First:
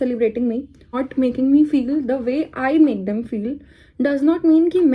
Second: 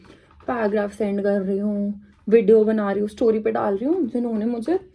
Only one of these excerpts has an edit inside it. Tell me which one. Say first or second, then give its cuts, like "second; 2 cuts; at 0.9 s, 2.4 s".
first; 1 cut; at 1.0 s